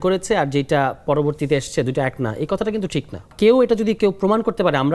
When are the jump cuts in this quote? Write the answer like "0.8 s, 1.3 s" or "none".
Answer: 3.3 s